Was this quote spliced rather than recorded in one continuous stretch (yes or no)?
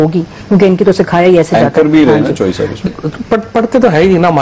yes